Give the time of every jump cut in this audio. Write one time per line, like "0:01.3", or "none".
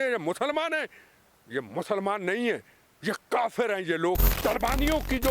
0:04.3